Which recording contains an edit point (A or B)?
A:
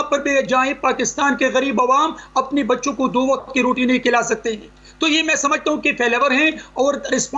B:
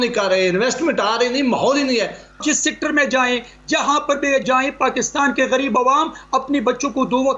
B